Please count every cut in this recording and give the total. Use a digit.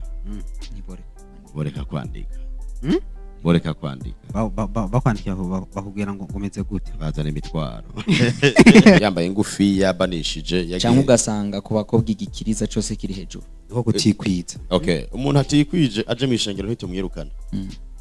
1